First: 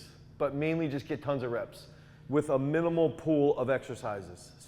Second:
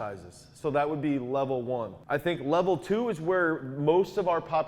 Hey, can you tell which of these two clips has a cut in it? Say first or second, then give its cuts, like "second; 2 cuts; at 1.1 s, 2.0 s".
second; 1 cut; at 1.9 s